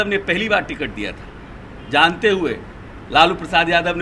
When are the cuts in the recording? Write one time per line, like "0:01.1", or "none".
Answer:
none